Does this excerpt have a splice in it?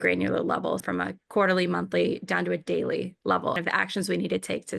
yes; 2 cuts; at 0.8 s, 3.6 s

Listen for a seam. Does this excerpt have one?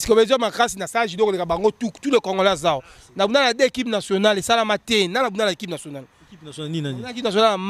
no; 0 cuts

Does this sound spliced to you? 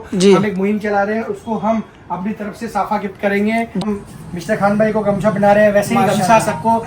yes; 1 cut; at 3.8 s

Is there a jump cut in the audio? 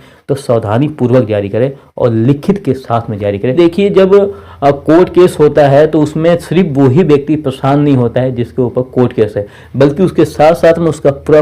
yes; 1 cut; at 3.5 s

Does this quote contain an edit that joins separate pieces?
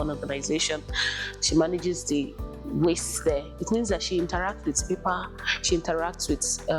no; 0 cuts

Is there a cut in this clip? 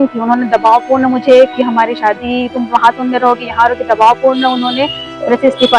no; 0 cuts

